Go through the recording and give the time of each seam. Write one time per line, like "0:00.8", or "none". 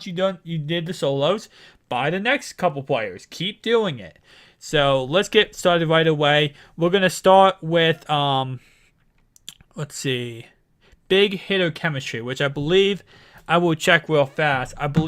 0:06.7